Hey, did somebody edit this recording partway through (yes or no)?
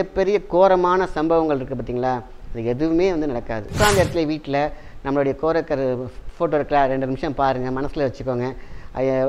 yes